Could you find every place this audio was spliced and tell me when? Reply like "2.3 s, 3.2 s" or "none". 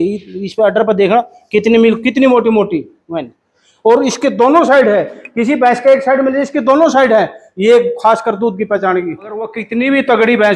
9.6 s